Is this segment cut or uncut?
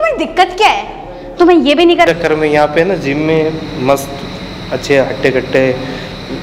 cut